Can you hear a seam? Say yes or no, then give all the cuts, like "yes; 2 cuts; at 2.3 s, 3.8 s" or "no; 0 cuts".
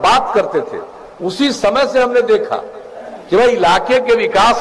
no; 0 cuts